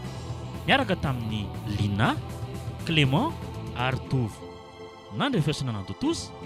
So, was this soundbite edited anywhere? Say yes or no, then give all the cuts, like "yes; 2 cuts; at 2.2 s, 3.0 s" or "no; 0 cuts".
no; 0 cuts